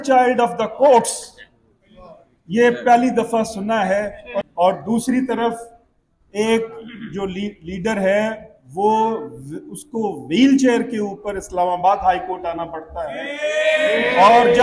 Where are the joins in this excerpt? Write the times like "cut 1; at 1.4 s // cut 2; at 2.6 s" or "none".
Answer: cut 1; at 4.5 s

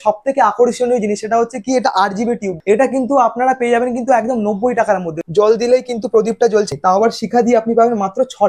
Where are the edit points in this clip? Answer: cut 1; at 2.6 s // cut 2; at 5.2 s // cut 3; at 6.7 s

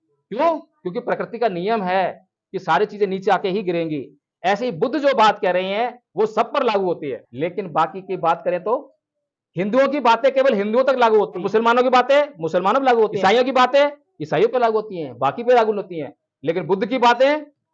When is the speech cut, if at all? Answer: cut 1; at 7.2 s // cut 2; at 11.5 s // cut 3; at 13.1 s

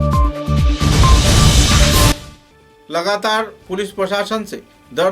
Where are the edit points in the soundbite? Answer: cut 1; at 2.1 s

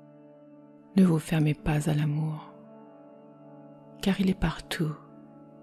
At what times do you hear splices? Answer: cut 1; at 0.9 s // cut 2; at 2.4 s // cut 3; at 4.0 s

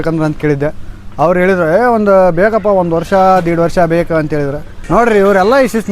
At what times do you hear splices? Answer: cut 1; at 4.7 s

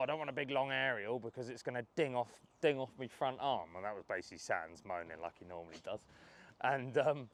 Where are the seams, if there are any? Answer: none

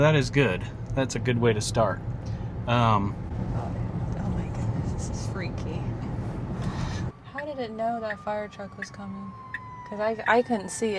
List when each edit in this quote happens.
cut 1; at 7.0 s

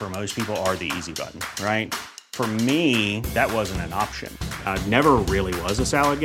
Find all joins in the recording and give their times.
none

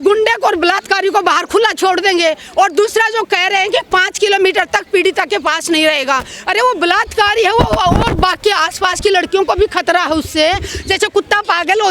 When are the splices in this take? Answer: none

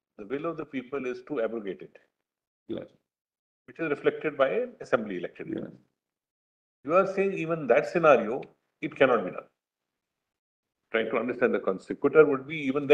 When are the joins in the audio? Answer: none

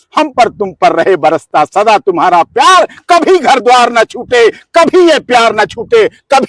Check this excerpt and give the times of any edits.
none

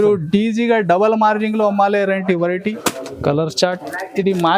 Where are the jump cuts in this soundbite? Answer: cut 1; at 2.8 s

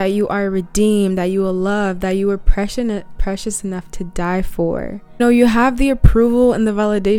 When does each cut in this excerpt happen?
cut 1; at 5.2 s

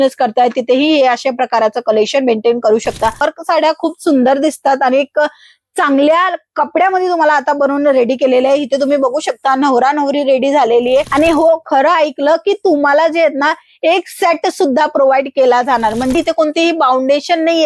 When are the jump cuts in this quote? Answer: cut 1; at 3.2 s // cut 2; at 11.1 s // cut 3; at 16.1 s

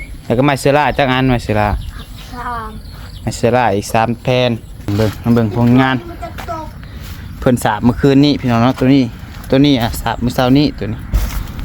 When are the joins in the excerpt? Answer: cut 1; at 4.9 s

